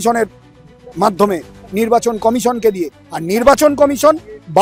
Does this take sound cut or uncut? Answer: uncut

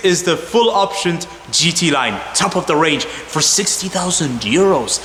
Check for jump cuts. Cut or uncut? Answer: uncut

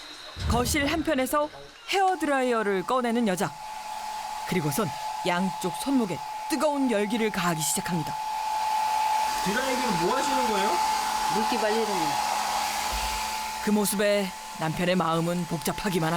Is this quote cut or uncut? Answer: uncut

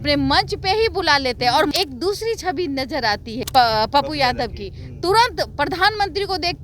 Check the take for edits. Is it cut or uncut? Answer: cut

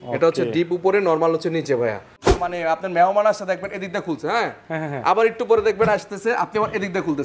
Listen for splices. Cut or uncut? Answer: cut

